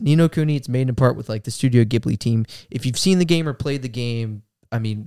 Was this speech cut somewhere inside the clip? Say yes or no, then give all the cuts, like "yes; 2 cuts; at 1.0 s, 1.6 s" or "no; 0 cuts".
no; 0 cuts